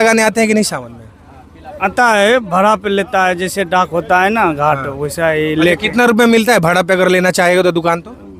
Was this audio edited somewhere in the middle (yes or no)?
no